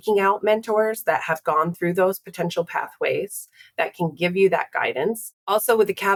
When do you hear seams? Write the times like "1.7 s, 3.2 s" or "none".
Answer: none